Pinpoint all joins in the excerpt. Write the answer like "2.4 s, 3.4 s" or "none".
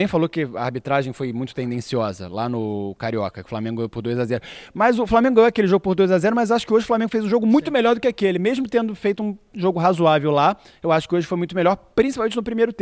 none